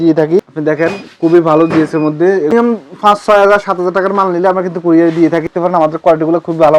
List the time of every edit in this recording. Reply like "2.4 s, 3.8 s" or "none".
1.1 s, 2.4 s, 5.4 s